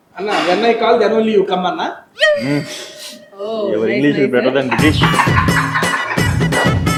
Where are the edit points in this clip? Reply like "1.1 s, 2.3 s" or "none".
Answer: none